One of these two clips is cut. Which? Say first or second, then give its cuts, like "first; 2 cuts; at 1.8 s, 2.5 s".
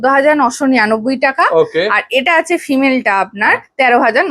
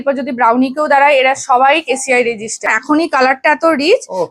second; 1 cut; at 2.7 s